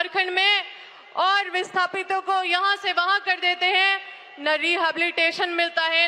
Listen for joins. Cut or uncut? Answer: uncut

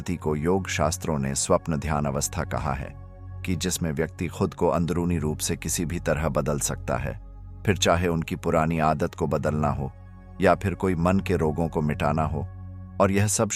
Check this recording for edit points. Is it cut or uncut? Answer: uncut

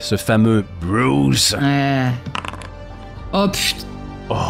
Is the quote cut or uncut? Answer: uncut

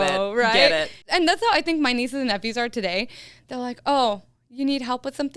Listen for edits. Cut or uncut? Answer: cut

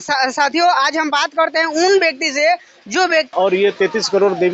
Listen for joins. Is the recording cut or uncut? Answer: cut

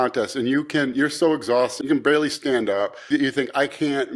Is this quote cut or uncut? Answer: cut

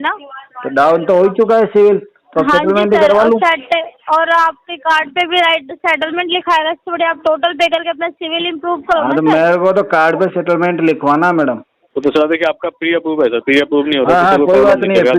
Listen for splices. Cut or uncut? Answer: cut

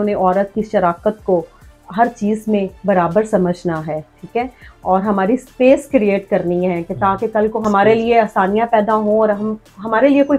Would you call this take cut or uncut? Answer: uncut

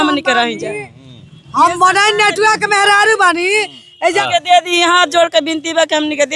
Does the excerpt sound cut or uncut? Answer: cut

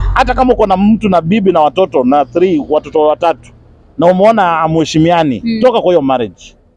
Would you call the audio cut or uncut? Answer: uncut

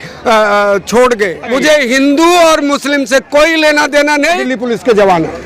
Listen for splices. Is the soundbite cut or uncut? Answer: cut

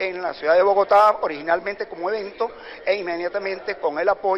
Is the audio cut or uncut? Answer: uncut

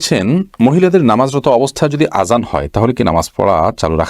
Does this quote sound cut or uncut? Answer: uncut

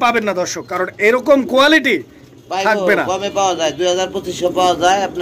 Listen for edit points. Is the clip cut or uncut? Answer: uncut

